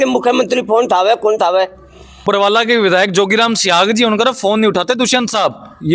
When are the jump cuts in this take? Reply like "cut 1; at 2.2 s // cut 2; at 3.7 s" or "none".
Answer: cut 1; at 2.2 s